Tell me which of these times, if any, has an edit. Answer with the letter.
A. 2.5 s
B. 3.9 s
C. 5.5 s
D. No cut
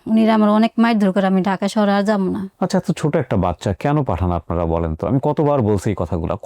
A